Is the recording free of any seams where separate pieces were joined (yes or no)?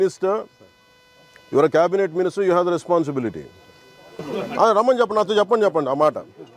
no